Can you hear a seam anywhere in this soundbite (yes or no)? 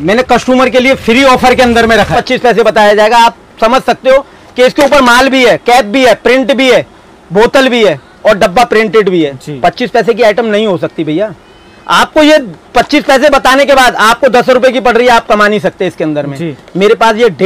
yes